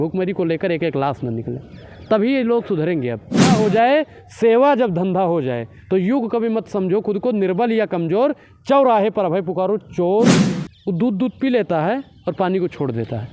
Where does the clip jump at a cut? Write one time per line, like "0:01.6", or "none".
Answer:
0:03.5
0:10.4